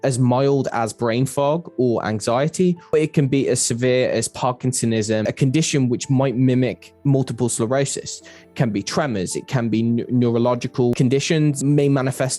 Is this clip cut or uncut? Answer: cut